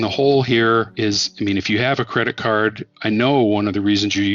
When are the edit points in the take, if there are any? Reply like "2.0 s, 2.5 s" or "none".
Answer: 0.9 s, 2.9 s